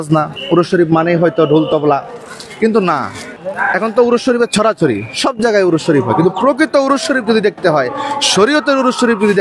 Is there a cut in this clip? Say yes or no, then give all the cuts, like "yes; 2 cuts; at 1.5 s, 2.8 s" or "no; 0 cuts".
no; 0 cuts